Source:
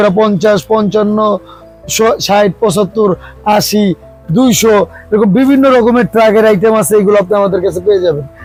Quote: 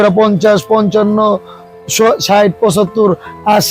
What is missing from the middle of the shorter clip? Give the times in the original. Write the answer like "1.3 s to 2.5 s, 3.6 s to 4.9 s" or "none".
none